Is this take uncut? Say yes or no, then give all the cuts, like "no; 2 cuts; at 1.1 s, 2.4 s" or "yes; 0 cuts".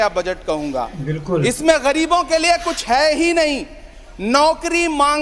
yes; 0 cuts